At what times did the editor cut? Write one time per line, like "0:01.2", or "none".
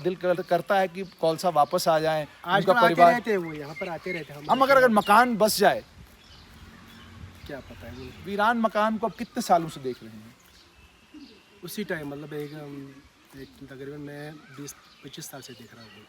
0:08.2

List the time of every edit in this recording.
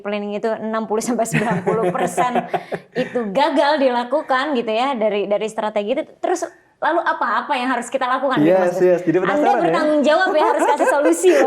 none

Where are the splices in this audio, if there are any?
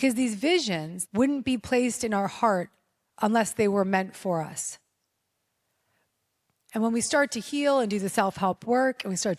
0:00.9

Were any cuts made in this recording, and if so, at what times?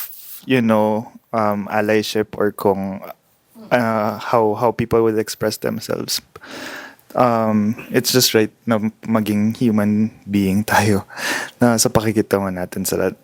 none

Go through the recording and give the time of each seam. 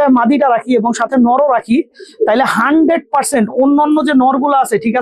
none

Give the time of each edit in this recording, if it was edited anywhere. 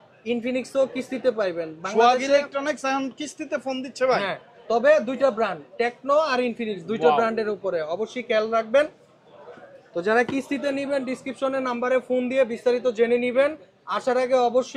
none

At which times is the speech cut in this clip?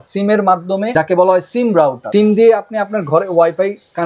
0:00.9
0:02.0

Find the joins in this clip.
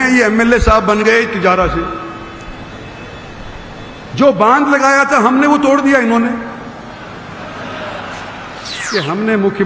0:08.7

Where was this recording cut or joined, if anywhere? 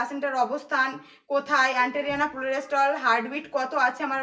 none

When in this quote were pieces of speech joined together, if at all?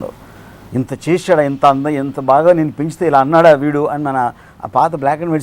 none

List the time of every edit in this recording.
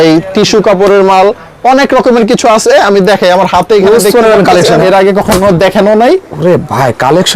0:04.8

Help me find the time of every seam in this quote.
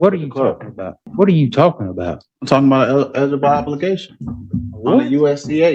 0:01.0

